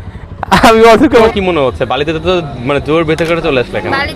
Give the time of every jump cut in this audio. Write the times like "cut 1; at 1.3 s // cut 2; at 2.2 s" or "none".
cut 1; at 1.1 s